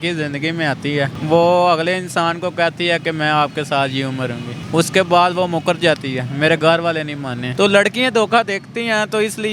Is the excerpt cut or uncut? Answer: cut